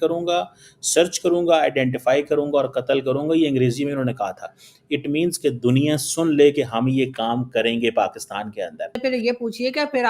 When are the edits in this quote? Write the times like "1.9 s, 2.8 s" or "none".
9.0 s